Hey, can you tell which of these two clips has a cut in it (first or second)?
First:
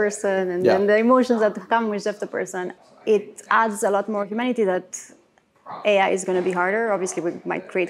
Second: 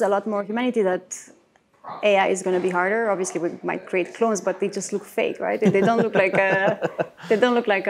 first